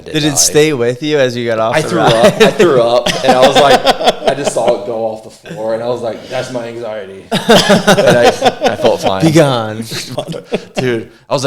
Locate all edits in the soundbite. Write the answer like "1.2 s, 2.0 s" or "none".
10.1 s

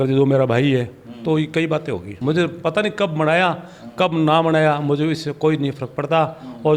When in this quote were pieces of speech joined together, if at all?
2.1 s

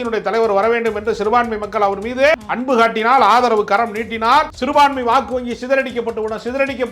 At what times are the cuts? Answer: 2.4 s, 4.6 s

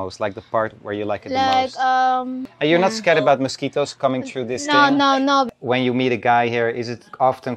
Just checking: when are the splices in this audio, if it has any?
2.4 s, 5.5 s

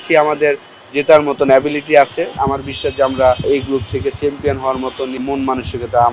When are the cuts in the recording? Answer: 2.3 s, 3.5 s, 5.2 s

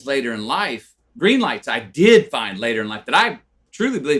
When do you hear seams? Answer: 1.0 s

